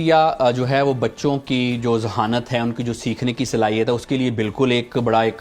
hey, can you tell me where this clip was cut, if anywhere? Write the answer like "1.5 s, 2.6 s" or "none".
none